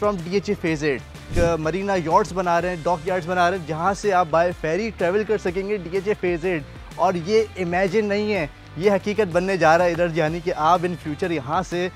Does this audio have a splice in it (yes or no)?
yes